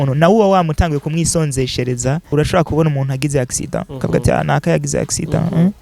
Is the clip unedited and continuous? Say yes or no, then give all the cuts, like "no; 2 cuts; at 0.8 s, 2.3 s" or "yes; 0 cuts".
no; 1 cut; at 2.3 s